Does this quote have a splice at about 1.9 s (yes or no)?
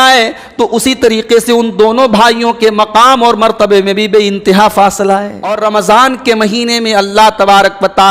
no